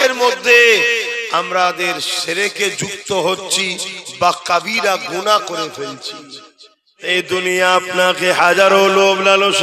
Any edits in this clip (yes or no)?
yes